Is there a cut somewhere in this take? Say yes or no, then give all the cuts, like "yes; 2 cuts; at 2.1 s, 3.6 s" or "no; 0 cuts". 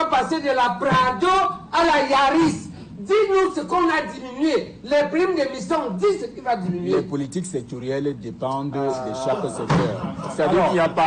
no; 0 cuts